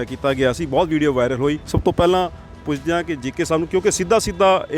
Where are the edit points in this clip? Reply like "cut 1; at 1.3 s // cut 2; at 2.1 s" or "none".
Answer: cut 1; at 1.7 s